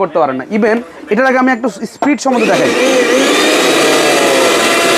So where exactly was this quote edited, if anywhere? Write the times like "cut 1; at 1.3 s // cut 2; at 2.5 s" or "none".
cut 1; at 0.9 s